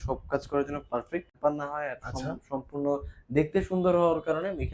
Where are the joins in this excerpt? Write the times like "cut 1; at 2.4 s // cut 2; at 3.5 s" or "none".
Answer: cut 1; at 1.3 s